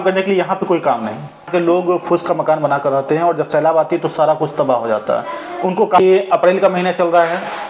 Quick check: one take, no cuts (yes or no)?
no